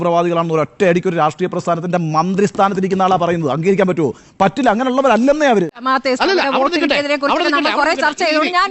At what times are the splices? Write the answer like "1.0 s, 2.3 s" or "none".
5.8 s